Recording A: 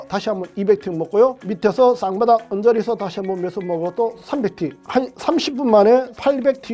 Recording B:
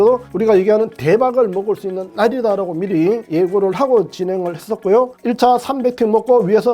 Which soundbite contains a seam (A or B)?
B